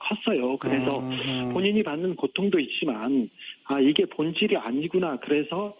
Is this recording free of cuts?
no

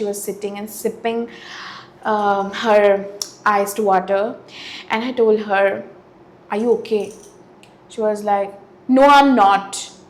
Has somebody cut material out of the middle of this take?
no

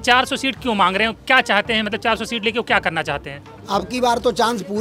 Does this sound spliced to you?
yes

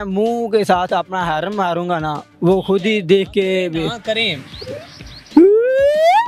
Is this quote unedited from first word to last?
yes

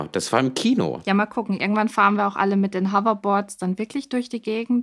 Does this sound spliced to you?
yes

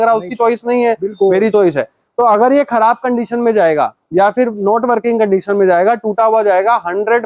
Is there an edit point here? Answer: no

